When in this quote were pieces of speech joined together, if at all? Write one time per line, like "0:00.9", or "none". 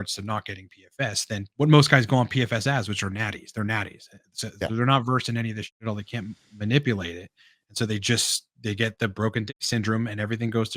0:01.5